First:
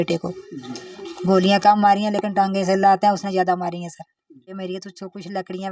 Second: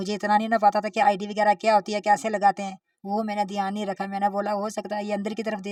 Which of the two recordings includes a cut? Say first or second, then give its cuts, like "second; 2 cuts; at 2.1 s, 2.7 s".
first; 1 cut; at 4.5 s